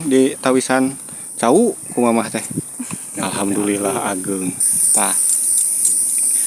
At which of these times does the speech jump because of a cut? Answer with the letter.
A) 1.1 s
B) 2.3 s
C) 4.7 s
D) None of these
C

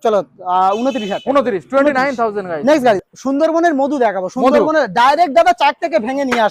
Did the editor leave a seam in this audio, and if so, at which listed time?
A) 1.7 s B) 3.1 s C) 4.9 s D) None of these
B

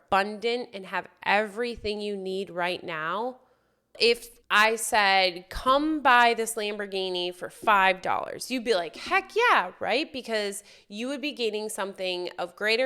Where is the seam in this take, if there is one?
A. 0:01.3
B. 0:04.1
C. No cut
B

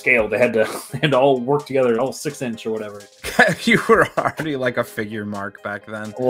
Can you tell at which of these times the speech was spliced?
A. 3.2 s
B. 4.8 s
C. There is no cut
A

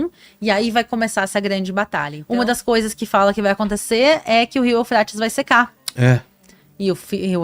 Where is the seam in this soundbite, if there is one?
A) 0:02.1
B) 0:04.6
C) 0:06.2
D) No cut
A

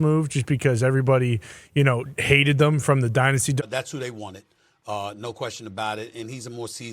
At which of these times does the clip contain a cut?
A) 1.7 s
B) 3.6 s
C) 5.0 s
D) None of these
B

